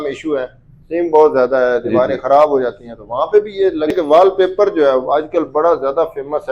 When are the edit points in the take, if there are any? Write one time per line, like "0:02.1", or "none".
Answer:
0:03.9